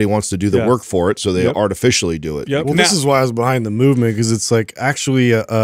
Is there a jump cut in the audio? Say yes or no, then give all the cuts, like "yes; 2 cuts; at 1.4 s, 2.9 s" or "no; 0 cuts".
no; 0 cuts